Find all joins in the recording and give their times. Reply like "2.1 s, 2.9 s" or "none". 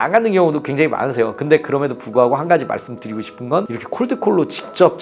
none